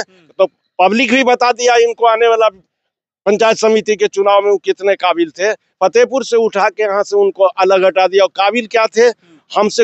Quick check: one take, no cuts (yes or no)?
yes